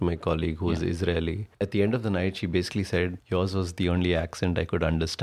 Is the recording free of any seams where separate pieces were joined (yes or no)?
yes